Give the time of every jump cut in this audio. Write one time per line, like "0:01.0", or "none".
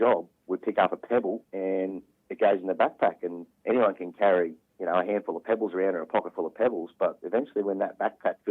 0:01.5
0:03.5